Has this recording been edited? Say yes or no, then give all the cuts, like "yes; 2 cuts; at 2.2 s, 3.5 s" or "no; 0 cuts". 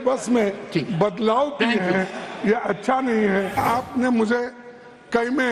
yes; 1 cut; at 3.5 s